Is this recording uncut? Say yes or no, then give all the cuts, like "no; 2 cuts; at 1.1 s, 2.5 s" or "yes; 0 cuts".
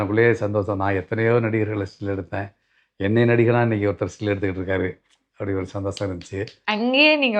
yes; 0 cuts